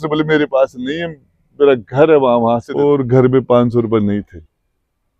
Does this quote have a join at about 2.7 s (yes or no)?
yes